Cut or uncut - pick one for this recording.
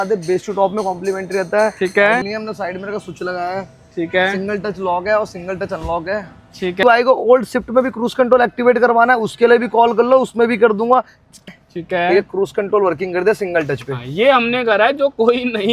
cut